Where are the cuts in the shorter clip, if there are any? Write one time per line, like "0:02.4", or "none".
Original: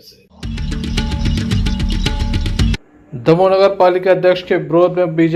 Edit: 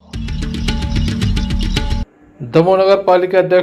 0:02.0